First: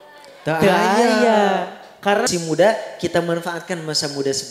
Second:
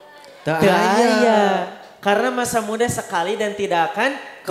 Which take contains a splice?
first; 1 cut; at 2.3 s

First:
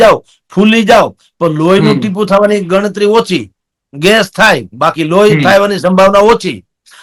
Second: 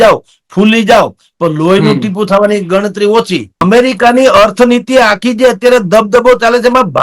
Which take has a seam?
second; 1 cut; at 3.6 s

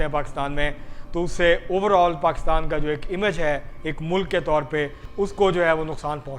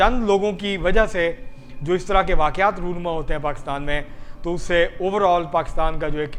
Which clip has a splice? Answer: first; 1 cut; at 5.0 s

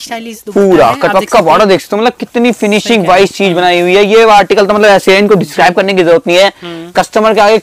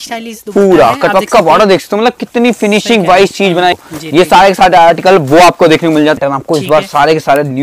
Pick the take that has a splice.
second; 2 cuts; at 3.7 s, 6.2 s

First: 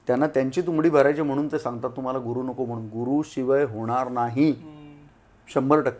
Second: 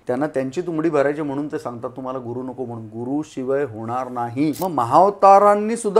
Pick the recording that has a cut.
second; 1 cut; at 4.6 s

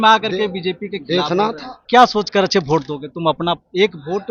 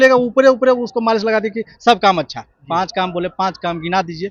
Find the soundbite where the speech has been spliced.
first; 1 cut; at 1.7 s

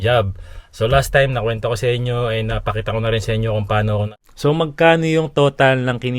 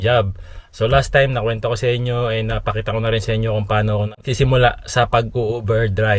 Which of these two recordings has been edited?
first; 1 cut; at 4.2 s

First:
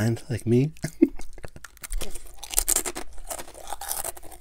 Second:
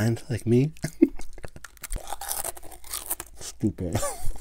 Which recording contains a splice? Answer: second; 1 cut; at 1.9 s

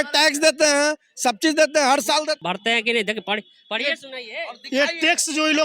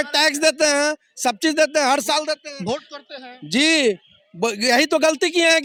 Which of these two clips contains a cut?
first; 1 cut; at 2.4 s

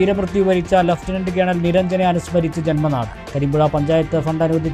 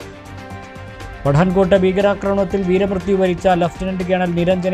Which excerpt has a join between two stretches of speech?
second; 1 cut; at 0.9 s

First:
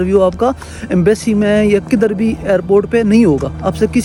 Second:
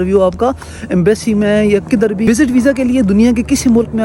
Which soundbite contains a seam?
second; 1 cut; at 2.3 s

